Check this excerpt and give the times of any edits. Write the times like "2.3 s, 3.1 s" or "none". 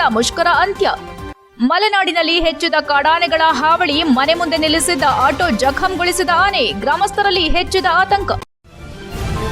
8.4 s